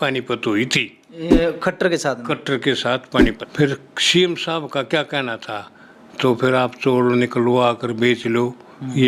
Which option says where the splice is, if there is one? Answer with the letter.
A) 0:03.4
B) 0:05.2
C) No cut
A